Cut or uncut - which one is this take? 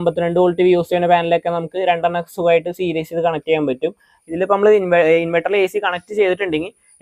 cut